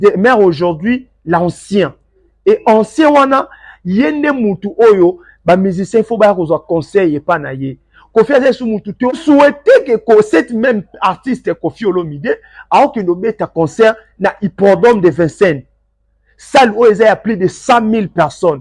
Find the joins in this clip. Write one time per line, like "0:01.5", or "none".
0:09.1